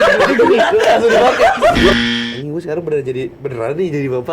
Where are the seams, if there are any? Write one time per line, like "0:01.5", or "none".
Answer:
0:02.0